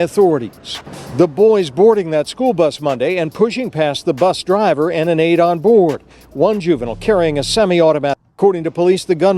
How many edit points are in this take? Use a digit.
1